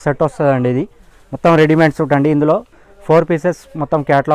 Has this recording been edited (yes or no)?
no